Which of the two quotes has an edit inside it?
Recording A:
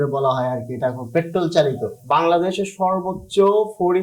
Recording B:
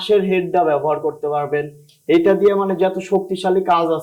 A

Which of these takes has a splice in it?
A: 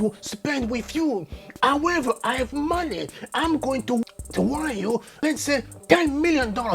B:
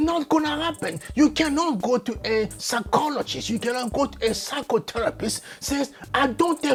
A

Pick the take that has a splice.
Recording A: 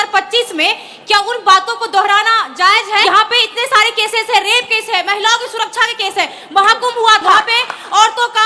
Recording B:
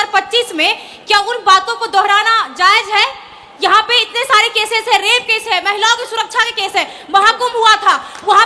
A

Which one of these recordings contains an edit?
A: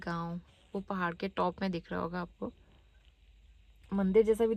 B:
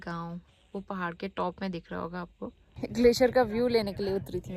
B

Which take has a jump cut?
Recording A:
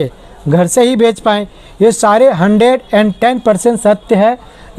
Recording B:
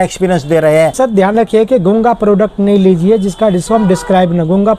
B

